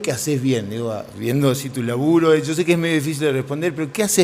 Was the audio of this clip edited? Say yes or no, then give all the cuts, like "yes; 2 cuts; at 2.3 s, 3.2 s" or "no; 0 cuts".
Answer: no; 0 cuts